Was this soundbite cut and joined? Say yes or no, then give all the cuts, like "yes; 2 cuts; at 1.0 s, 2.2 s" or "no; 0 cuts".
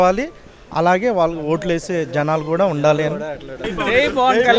yes; 1 cut; at 3.6 s